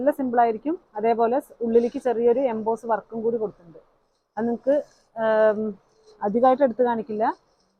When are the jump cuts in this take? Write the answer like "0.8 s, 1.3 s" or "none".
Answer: none